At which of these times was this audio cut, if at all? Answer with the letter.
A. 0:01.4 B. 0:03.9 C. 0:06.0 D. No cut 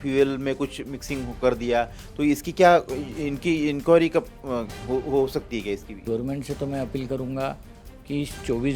C